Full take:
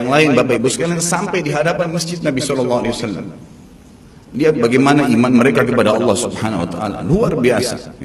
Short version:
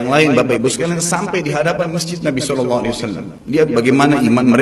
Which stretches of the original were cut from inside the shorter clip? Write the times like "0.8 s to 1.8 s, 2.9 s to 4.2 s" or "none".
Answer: 3.3 s to 4.2 s